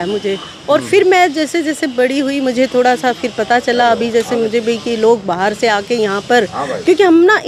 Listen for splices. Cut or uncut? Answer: uncut